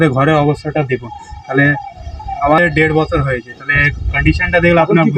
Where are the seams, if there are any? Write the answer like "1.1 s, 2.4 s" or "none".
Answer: none